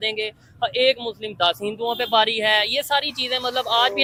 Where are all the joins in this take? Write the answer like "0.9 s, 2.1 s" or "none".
none